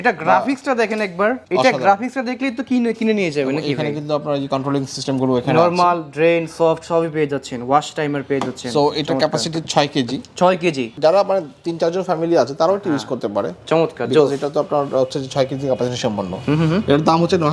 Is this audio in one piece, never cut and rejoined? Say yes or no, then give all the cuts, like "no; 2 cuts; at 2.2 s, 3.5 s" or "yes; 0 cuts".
yes; 0 cuts